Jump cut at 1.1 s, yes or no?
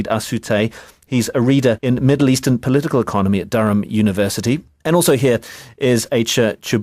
no